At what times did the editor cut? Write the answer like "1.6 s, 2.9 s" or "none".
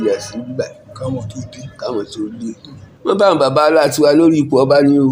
3.1 s